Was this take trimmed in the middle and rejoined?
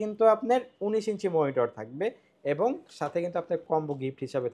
no; 0 cuts

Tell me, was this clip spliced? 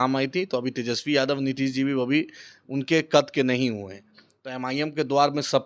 no; 0 cuts

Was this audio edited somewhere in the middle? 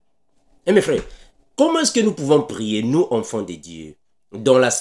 no; 0 cuts

